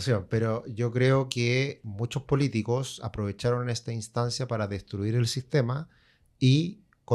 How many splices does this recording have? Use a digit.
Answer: 1